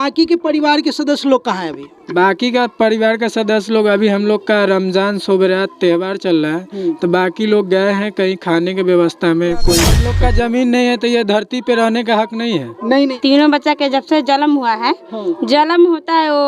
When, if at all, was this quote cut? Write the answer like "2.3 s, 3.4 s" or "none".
10.0 s, 13.1 s